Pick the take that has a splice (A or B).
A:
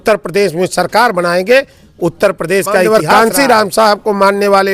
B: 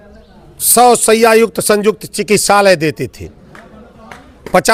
A